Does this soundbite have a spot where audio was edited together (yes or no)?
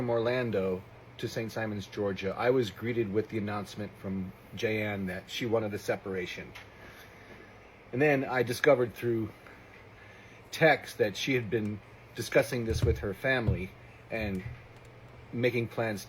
yes